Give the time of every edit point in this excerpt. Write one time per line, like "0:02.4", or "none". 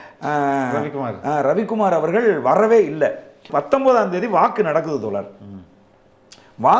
0:03.4